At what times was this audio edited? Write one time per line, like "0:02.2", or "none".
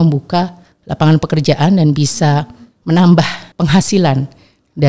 0:03.4